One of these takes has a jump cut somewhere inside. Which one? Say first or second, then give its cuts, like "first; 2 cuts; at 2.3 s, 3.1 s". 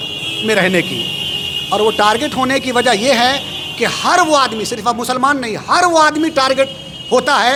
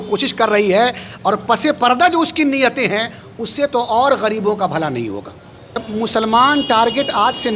second; 1 cut; at 5.8 s